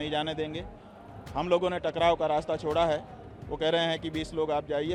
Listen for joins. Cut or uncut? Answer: uncut